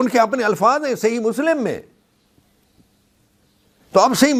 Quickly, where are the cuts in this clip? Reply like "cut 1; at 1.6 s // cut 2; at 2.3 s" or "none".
none